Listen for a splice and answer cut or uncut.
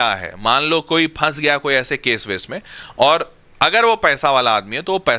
uncut